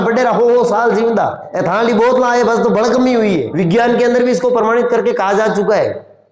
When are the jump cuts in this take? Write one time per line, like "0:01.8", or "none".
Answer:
0:01.5
0:03.5